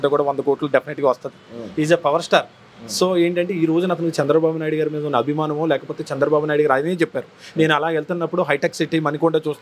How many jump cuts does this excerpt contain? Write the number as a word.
zero